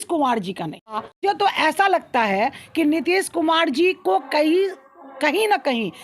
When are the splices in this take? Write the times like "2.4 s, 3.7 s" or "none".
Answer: 1.2 s